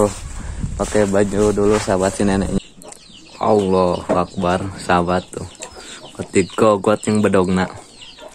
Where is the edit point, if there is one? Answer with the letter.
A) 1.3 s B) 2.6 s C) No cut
B